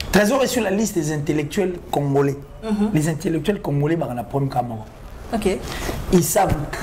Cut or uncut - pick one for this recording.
uncut